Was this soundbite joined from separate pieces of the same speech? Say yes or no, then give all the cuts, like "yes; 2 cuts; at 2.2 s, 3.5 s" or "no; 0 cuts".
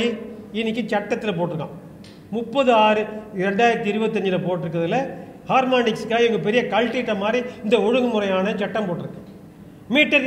no; 0 cuts